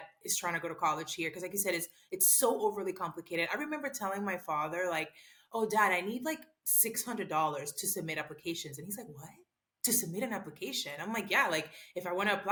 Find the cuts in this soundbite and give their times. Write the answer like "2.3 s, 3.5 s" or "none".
none